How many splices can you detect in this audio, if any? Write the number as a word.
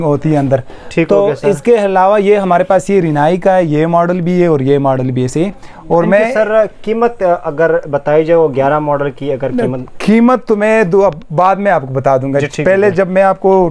zero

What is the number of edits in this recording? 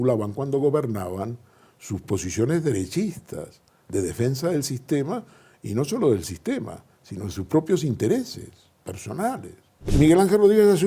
one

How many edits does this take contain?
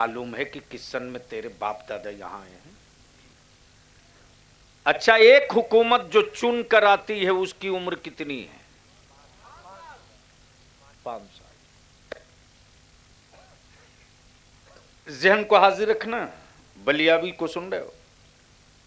one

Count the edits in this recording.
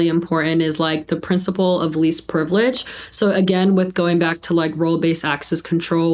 zero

